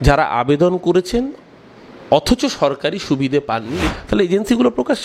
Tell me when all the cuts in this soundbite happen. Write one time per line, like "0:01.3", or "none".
0:03.8